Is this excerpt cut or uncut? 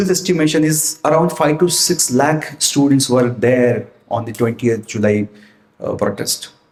uncut